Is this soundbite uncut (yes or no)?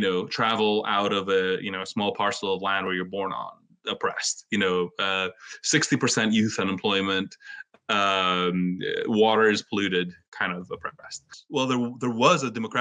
no